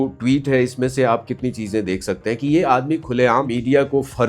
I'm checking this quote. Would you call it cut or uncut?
uncut